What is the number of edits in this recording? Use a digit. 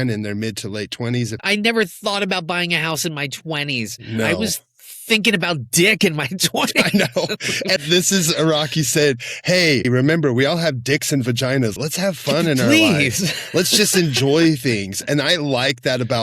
4